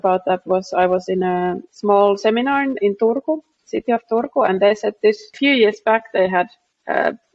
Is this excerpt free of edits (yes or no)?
no